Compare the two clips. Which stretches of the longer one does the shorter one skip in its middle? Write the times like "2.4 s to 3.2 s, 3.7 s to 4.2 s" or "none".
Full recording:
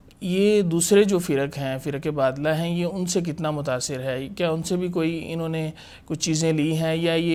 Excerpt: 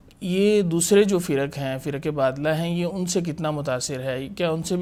none